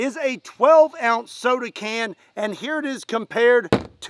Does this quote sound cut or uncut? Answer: uncut